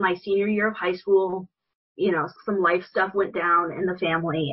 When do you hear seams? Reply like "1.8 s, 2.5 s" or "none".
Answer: 2.4 s